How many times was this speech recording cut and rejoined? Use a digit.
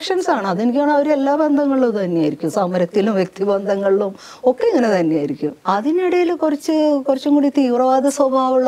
1